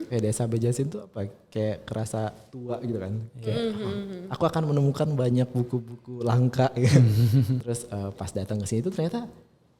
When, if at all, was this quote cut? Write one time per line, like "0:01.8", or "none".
0:07.6